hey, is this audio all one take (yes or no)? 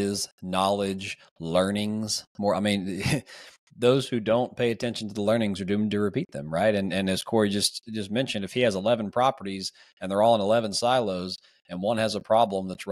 yes